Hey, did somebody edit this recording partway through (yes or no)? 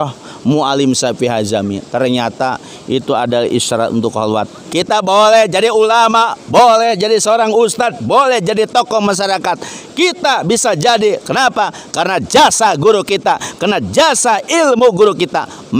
yes